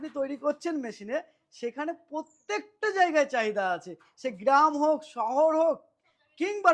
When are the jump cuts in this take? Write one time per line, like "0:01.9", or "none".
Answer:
none